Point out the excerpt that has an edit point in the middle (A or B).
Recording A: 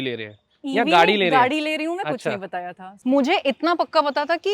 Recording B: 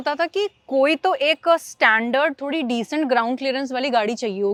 A